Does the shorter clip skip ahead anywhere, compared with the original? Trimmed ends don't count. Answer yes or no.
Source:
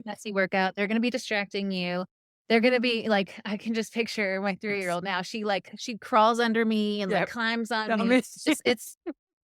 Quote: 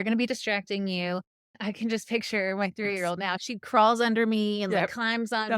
yes